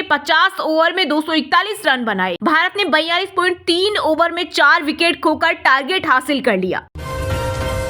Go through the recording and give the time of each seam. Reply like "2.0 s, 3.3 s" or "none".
2.4 s, 7.0 s